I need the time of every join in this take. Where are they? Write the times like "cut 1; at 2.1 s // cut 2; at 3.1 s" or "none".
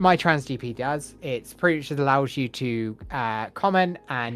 cut 1; at 1.2 s